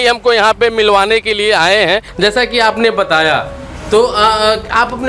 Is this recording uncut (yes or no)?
no